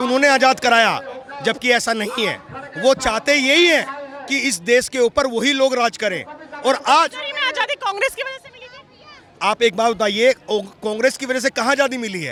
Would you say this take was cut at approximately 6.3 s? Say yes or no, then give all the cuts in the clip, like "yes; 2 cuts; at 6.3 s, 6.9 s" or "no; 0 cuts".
no; 0 cuts